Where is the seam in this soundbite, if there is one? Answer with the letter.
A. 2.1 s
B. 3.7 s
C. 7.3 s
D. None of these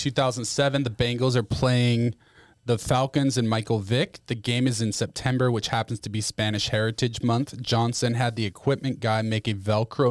D